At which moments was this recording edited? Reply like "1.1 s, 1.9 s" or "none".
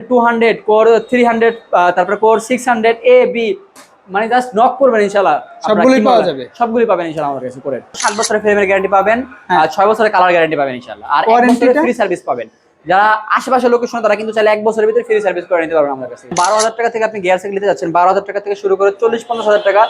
8.0 s, 16.3 s